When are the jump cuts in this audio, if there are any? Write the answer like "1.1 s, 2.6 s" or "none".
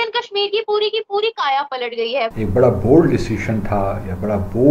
2.3 s